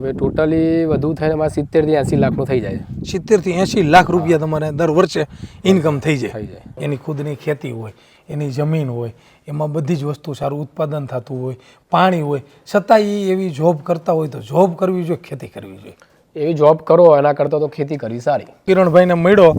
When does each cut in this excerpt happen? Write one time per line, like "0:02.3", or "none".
0:06.8
0:18.6